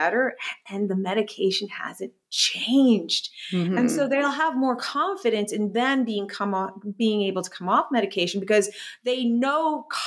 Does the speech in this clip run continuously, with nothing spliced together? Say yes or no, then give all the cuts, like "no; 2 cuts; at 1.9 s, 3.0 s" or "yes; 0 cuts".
yes; 0 cuts